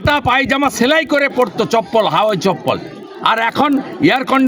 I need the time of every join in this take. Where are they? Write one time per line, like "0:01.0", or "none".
none

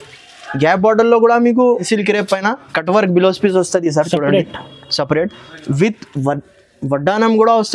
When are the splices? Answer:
0:01.8

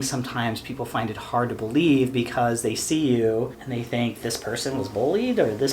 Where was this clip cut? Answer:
none

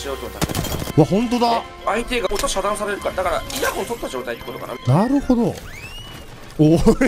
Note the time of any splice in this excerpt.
0:00.9
0:02.3
0:03.5
0:04.8

